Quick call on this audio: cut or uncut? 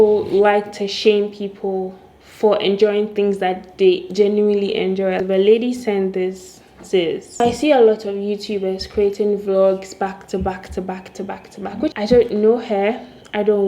cut